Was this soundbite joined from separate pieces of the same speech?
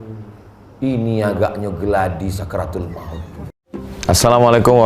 yes; 1 cut; at 3.4 s

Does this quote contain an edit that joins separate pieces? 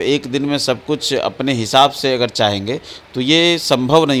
no; 0 cuts

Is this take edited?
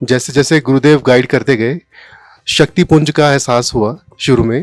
no; 0 cuts

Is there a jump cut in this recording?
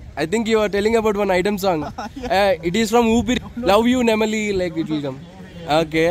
yes; 1 cut; at 3.5 s

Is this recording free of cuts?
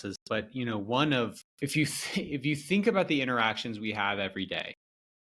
no; 1 cut; at 1.4 s

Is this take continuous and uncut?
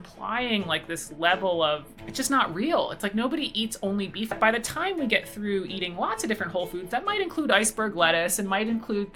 no; 2 cuts; at 2.0 s, 4.3 s

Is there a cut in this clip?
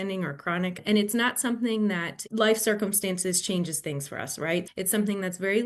yes; 3 cuts; at 0.8 s, 2.1 s, 4.7 s

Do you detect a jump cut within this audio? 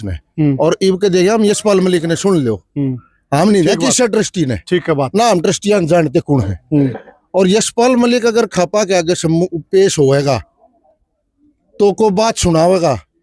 no; 0 cuts

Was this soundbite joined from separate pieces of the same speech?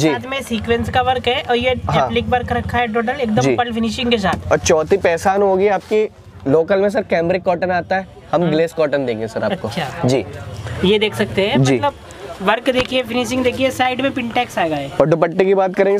no; 0 cuts

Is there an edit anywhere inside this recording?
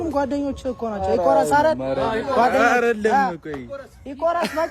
no; 0 cuts

